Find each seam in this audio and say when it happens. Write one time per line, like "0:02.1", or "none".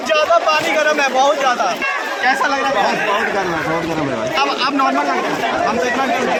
none